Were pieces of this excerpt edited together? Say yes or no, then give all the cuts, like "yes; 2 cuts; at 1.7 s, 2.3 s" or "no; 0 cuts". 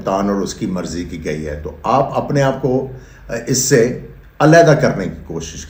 no; 0 cuts